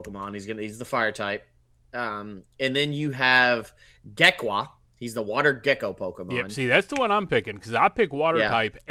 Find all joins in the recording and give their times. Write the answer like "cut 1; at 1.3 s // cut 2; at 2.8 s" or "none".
none